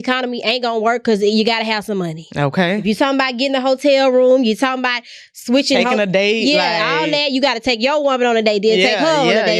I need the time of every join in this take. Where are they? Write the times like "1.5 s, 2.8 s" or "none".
none